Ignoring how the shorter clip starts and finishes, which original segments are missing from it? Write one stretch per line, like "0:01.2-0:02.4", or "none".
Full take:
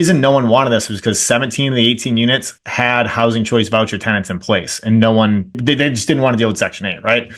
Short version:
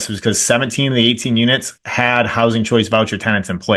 none